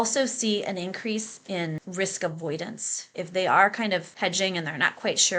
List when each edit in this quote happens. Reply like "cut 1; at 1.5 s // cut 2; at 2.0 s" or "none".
cut 1; at 1.8 s // cut 2; at 3.1 s // cut 3; at 4.1 s